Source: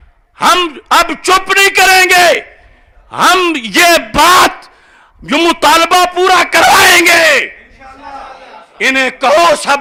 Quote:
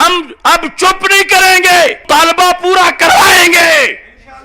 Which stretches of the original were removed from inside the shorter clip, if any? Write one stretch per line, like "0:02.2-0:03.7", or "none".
0:02.5-0:05.6

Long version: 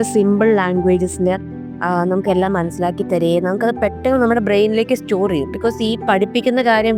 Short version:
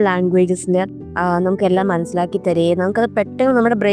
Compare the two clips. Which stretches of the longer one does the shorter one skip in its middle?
0:01.5-0:01.7

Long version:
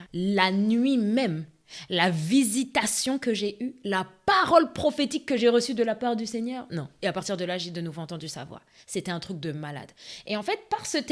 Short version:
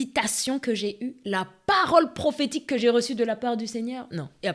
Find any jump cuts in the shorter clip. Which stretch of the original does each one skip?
none

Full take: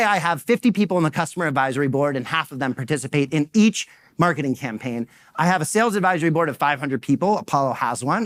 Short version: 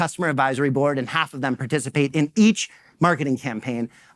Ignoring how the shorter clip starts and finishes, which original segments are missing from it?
none

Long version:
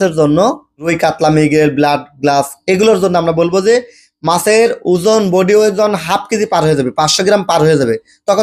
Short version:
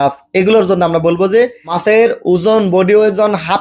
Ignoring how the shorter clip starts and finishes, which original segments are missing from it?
0:04.0-0:04.3

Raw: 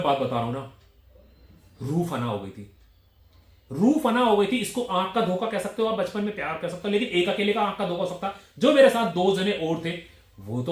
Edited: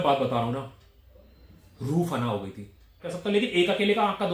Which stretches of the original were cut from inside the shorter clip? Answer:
0:03.0-0:06.6

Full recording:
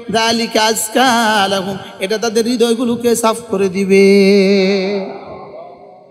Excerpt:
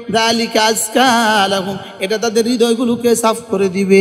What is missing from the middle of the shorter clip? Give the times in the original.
none

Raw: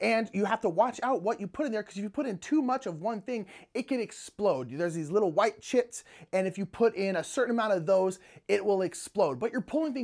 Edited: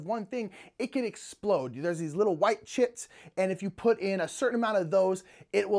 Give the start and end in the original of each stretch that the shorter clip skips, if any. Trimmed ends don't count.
none

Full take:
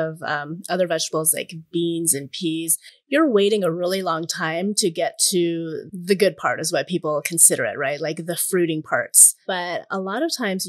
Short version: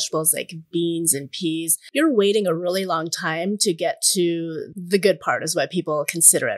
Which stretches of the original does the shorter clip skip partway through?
0:02.8-0:02.9

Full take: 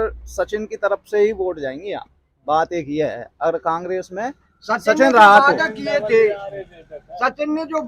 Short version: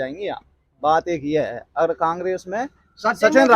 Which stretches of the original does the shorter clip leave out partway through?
none

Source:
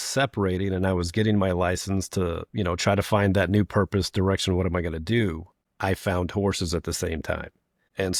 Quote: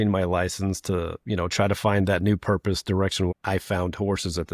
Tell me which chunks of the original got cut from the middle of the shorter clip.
0:04.6-0:05.7

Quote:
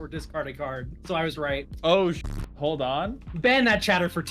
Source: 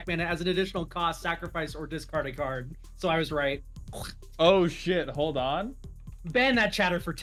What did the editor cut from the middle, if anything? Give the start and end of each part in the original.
0:02.7-0:02.9
0:03.6-0:04.3
0:05.8-0:06.1

